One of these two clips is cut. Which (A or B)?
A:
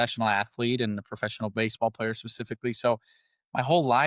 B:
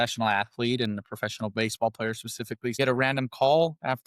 B